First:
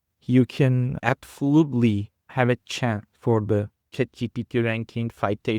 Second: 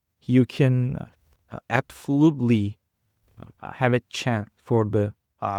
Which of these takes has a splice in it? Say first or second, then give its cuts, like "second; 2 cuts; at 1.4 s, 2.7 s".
first; 3 cuts; at 0.9 s, 2.2 s, 3.8 s